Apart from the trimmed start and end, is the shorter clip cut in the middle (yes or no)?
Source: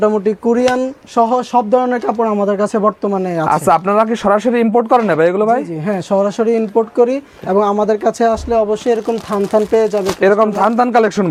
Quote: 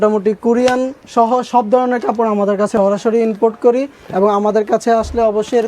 yes